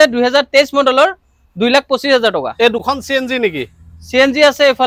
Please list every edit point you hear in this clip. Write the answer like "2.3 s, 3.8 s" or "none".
none

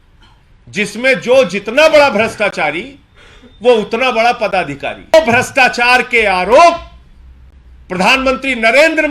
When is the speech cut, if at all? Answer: 5.1 s

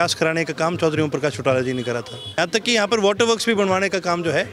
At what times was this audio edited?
2.2 s

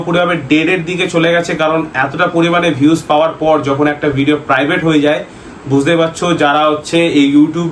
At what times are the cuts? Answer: none

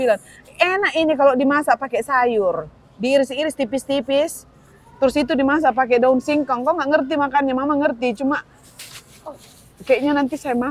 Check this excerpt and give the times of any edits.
none

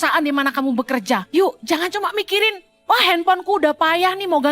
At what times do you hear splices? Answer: 1.2 s, 2.7 s

